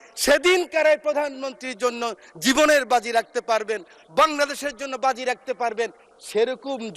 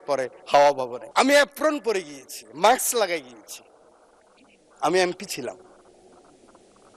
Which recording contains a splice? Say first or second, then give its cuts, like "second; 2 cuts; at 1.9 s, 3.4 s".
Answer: second; 1 cut; at 1.0 s